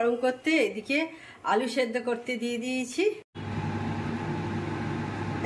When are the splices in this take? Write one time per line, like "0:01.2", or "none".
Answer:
0:03.3